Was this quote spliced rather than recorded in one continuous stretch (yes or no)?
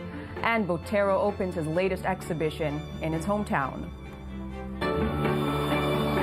yes